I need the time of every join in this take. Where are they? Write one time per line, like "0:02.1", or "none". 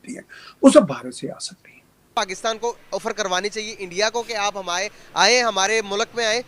0:02.1